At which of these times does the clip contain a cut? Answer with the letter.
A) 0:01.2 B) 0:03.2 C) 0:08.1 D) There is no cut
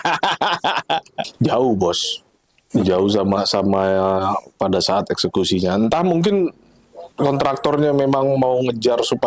A